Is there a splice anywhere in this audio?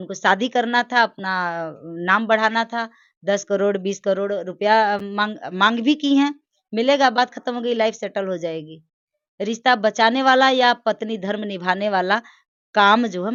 no; 0 cuts

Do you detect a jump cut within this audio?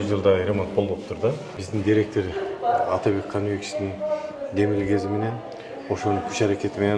yes; 1 cut; at 1.5 s

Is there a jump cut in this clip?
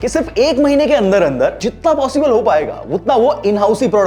yes; 1 cut; at 1.6 s

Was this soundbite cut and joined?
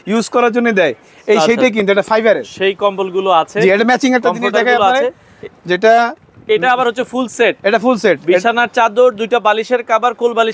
no; 0 cuts

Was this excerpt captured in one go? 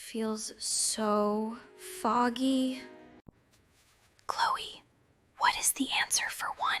yes; 0 cuts

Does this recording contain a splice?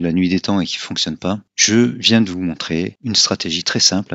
yes; 2 cuts; at 1.5 s, 3.0 s

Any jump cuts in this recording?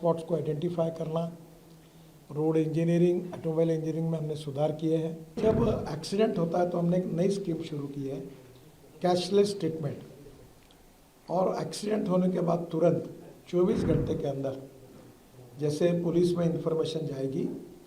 yes; 1 cut; at 5.4 s

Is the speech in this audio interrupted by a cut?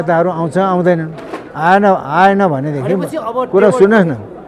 no; 0 cuts

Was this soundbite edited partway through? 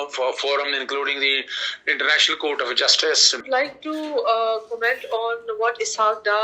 yes; 1 cut; at 3.4 s

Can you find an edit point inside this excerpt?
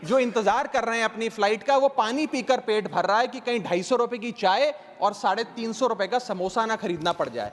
no; 0 cuts

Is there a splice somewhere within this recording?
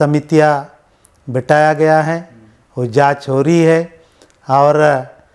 no; 0 cuts

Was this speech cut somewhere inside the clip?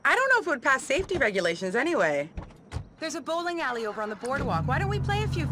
no; 0 cuts

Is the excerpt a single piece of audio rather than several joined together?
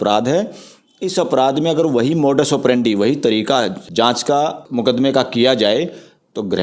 no; 2 cuts; at 3.8 s, 4.6 s

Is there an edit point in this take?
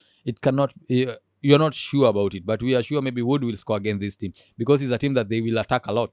no; 0 cuts

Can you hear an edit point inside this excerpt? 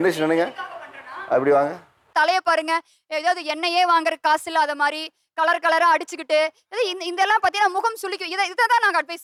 no; 0 cuts

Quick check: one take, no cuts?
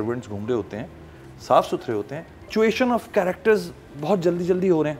no; 1 cut; at 2.5 s

